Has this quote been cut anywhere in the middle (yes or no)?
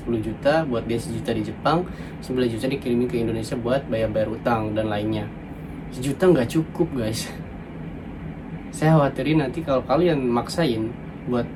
no